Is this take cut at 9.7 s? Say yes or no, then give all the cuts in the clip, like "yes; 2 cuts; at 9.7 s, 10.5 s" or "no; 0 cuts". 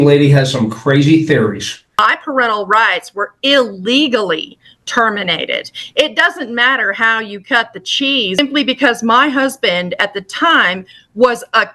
no; 2 cuts; at 1.9 s, 8.4 s